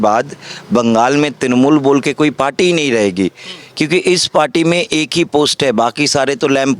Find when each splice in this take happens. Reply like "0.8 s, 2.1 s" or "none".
none

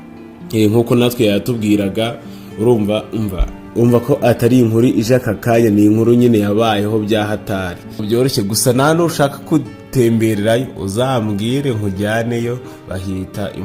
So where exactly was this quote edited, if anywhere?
8.0 s

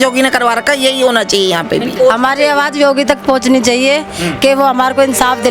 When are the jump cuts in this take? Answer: 1.9 s

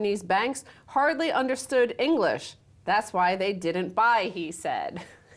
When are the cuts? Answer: 1.6 s

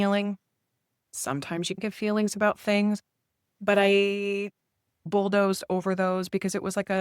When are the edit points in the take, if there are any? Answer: 1.8 s

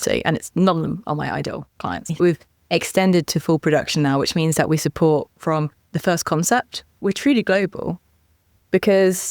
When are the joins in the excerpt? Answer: 2.2 s, 5.9 s, 7.0 s

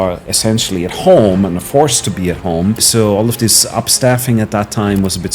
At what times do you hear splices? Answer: 2.9 s

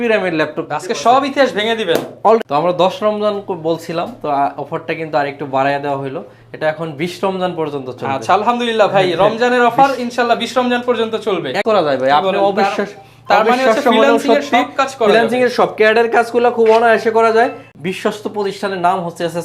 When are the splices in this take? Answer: 2.4 s, 11.6 s, 17.6 s

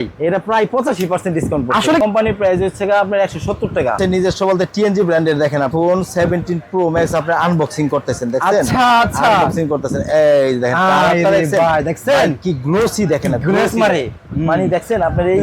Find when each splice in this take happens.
2.0 s, 4.0 s, 5.7 s

